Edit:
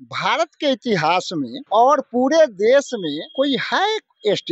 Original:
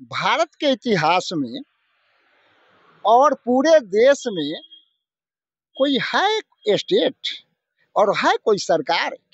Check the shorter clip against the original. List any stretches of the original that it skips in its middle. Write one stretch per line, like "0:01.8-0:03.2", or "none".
0:01.6-0:02.9
0:04.6-0:05.7